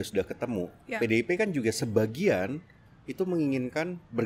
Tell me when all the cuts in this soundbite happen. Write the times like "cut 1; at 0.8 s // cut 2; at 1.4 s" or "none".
none